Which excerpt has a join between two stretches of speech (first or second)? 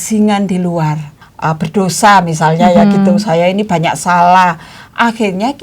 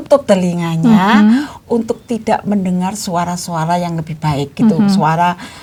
first